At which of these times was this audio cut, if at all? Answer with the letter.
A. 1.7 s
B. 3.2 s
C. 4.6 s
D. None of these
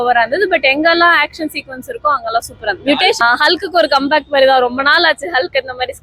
B